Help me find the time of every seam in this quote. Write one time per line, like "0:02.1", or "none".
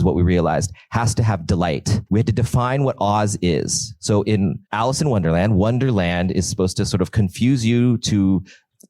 0:02.0
0:04.6